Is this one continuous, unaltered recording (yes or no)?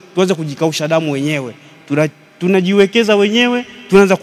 yes